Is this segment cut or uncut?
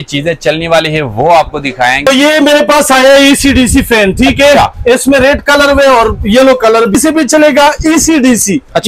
cut